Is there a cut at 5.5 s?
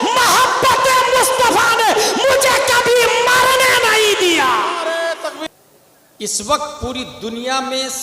yes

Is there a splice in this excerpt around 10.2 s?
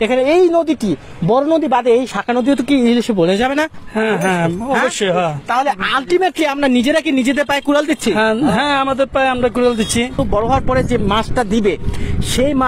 yes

